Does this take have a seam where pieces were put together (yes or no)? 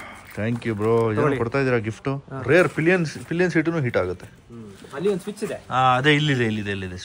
yes